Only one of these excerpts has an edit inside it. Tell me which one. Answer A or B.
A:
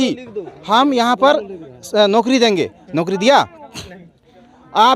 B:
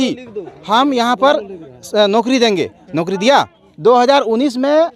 B